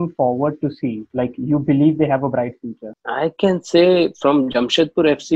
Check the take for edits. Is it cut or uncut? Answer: uncut